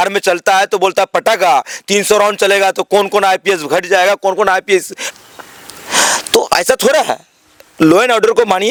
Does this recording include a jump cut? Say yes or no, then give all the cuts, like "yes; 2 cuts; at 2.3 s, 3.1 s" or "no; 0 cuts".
no; 0 cuts